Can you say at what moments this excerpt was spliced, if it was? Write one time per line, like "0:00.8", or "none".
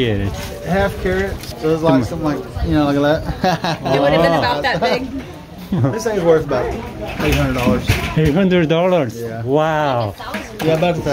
0:01.4
0:05.5